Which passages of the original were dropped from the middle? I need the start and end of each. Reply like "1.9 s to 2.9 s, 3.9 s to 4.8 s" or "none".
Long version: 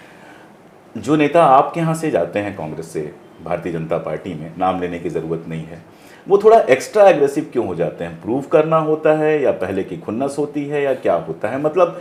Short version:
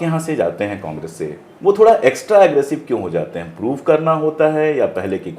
3.2 s to 6.1 s